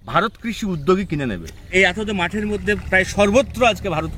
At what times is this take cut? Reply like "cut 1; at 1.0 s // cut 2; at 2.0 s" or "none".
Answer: cut 1; at 1.7 s

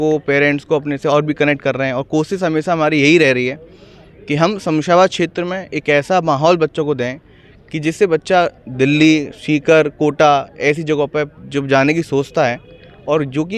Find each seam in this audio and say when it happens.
none

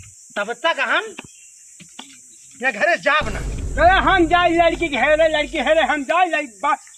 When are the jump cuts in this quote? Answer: cut 1; at 3.5 s

